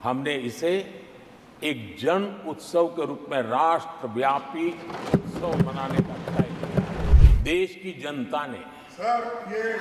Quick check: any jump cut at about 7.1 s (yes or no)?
yes